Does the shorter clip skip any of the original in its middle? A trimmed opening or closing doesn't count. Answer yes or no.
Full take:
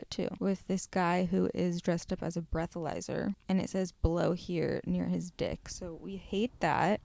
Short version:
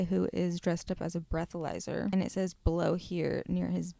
yes